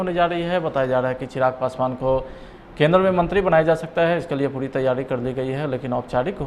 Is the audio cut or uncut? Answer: uncut